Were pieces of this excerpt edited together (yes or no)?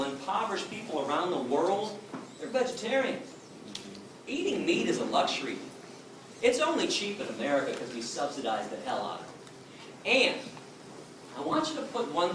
no